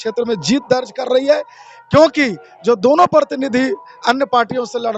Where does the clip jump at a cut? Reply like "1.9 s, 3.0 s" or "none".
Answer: none